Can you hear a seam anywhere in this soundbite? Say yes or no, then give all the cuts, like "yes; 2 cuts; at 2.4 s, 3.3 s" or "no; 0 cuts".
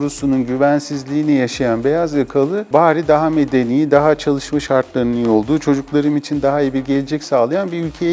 no; 0 cuts